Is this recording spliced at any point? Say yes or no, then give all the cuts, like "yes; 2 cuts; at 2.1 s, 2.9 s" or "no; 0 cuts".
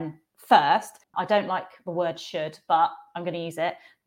yes; 1 cut; at 1.1 s